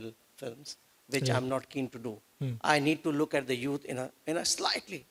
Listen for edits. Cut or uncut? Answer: uncut